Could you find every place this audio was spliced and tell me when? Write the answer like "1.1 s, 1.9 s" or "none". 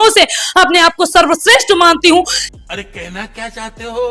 none